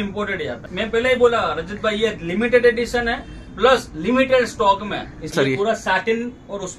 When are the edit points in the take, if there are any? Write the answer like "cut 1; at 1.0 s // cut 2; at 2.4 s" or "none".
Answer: cut 1; at 0.8 s // cut 2; at 5.3 s